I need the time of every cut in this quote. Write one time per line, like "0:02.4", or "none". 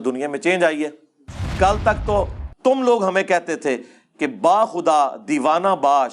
0:01.4

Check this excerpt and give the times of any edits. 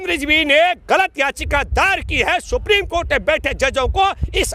none

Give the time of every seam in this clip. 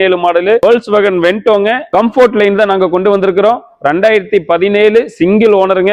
none

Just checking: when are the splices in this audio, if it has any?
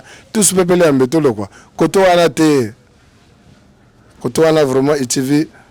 none

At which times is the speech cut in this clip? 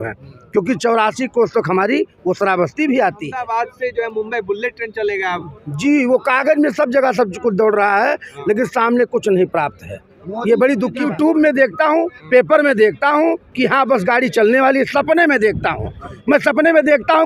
0:03.4
0:11.0

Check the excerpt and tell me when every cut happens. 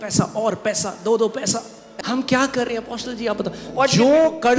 0:01.8

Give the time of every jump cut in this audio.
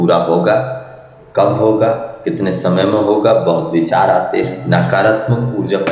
0:04.6

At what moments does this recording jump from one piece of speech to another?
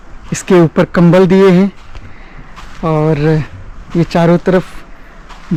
none

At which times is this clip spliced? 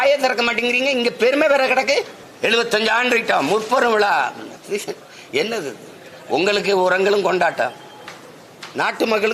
0:02.2
0:04.5

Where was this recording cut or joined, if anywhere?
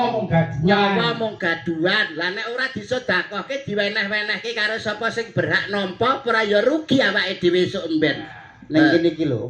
none

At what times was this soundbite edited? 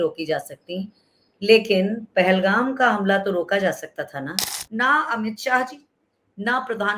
0:04.6

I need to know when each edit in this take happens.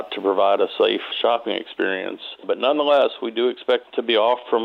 0:01.1
0:02.4
0:03.9

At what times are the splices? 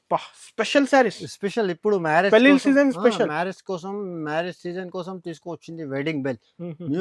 none

